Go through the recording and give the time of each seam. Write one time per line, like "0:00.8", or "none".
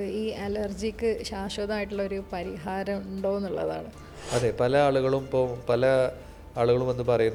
none